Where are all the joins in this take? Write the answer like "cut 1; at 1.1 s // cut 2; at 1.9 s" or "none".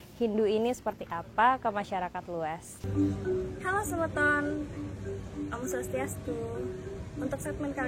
cut 1; at 2.9 s